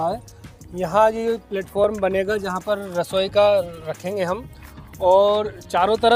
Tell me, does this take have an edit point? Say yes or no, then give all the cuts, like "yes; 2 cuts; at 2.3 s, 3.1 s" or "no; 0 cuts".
no; 0 cuts